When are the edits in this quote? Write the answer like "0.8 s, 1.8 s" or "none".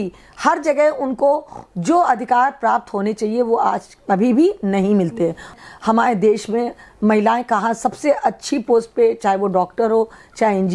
5.6 s